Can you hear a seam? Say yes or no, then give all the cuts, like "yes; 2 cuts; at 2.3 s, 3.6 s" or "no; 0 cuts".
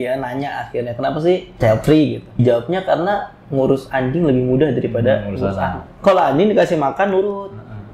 yes; 3 cuts; at 1.5 s, 2.4 s, 5.8 s